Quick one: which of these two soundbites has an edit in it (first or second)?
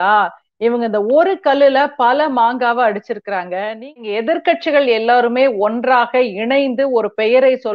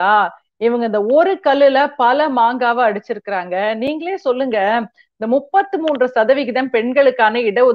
first